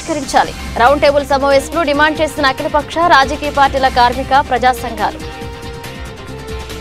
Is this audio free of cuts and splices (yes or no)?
no